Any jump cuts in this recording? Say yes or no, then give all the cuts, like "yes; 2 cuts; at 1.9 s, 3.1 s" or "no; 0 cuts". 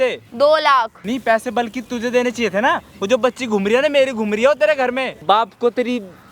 yes; 2 cuts; at 1.0 s, 5.1 s